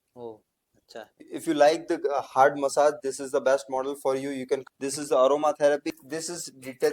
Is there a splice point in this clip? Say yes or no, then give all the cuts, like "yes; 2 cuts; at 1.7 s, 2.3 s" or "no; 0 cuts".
yes; 3 cuts; at 1.2 s, 4.6 s, 5.9 s